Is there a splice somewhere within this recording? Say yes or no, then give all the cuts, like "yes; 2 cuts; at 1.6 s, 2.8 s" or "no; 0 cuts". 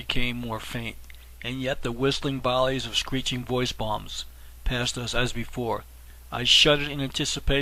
no; 0 cuts